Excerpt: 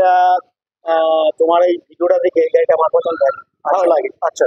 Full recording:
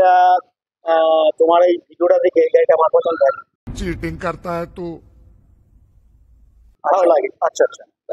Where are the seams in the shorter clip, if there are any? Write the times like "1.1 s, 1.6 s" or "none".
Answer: 3.5 s